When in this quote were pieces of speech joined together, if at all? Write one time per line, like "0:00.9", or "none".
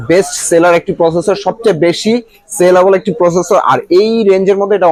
none